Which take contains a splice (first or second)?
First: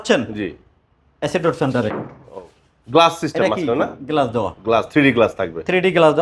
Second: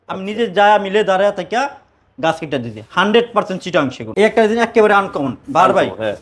second